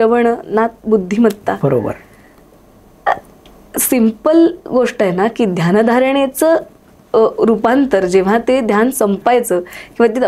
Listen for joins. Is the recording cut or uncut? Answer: uncut